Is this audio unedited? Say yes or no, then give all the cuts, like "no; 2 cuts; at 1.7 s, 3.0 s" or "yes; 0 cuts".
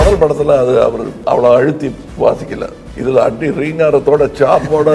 no; 3 cuts; at 1.1 s, 2.0 s, 2.9 s